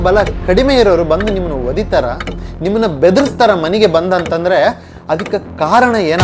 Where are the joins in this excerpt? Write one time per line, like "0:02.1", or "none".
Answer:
none